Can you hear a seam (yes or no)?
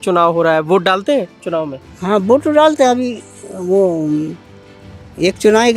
no